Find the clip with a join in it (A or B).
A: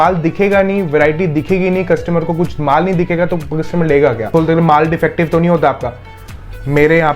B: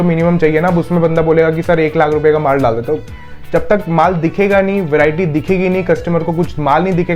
A